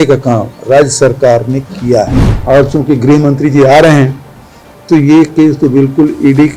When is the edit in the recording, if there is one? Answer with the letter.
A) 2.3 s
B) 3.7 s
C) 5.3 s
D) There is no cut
A